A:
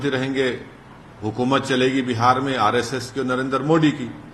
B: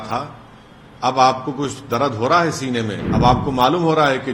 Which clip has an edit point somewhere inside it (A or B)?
B